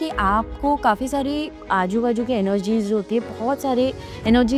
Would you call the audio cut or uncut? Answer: uncut